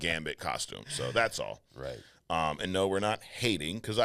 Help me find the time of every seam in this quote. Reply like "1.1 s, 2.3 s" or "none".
none